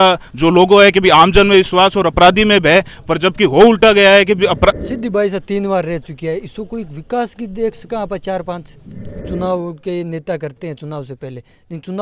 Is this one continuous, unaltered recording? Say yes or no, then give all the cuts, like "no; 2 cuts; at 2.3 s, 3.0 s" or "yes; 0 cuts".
no; 2 cuts; at 4.8 s, 9.1 s